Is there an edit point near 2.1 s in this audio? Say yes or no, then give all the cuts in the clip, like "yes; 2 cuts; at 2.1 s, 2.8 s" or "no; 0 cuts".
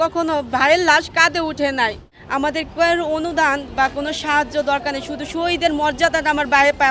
yes; 1 cut; at 2.1 s